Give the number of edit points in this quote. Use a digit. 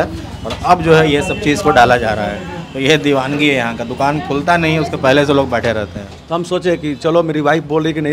1